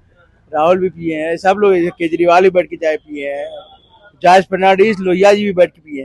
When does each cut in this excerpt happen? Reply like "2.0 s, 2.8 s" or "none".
none